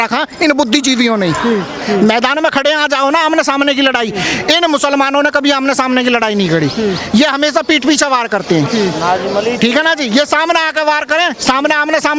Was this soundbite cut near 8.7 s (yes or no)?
no